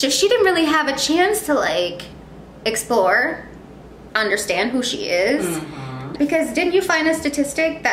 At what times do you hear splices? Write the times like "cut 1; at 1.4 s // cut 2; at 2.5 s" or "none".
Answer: cut 1; at 6.1 s